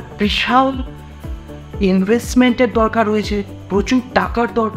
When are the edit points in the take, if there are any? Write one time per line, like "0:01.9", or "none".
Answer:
none

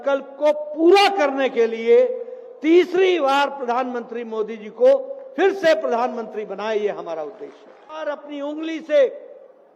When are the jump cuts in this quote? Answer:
0:08.0

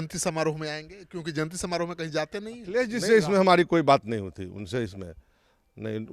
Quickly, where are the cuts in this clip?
0:02.8

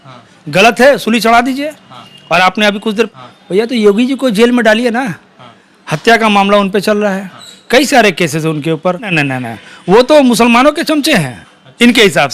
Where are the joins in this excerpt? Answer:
0:03.1
0:09.1

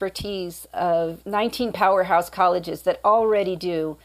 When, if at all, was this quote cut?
0:01.2

